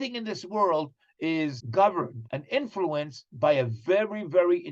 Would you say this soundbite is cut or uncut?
cut